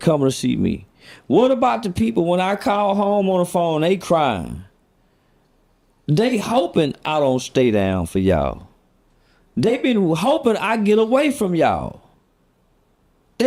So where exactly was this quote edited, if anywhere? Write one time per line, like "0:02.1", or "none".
0:01.6

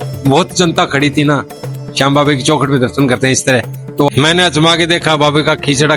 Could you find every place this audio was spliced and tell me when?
0:04.1

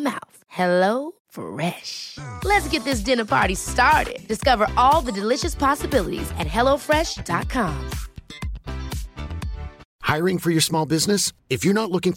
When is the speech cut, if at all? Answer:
0:09.8

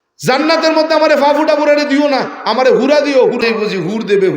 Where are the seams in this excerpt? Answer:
0:03.4

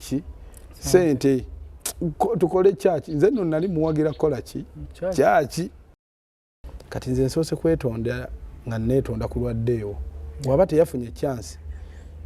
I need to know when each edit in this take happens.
0:06.4

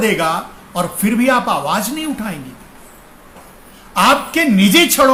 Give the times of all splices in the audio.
none

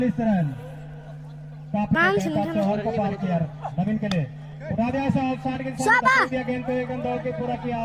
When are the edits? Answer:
0:02.0

